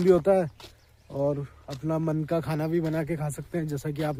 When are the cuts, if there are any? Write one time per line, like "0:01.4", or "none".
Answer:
none